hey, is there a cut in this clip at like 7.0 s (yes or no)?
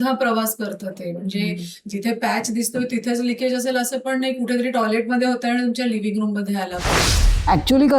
yes